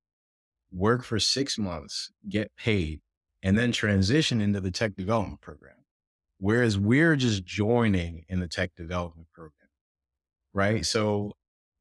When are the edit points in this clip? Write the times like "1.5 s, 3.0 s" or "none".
none